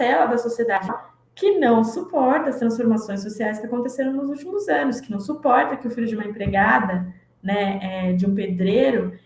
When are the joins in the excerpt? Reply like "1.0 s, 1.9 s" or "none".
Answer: 1.0 s